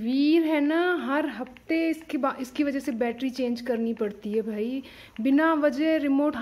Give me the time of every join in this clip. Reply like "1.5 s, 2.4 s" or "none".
none